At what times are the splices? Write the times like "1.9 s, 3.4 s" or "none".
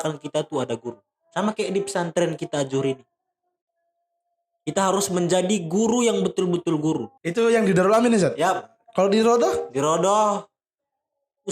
7.1 s